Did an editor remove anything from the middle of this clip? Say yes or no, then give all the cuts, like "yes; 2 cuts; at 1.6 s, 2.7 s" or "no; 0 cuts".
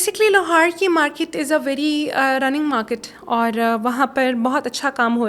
no; 0 cuts